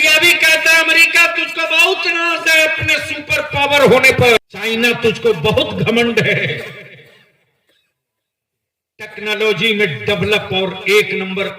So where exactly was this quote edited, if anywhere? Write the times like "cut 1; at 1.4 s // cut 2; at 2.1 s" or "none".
cut 1; at 4.4 s